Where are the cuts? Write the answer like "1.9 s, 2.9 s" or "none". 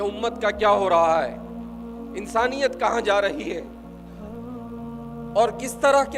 3.6 s, 5.0 s